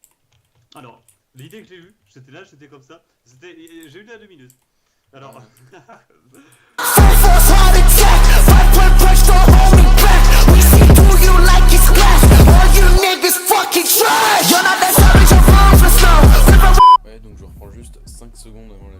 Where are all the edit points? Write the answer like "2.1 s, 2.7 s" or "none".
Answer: 2.0 s